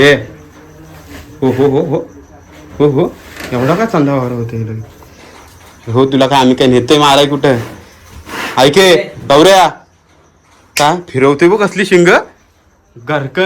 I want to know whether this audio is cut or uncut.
uncut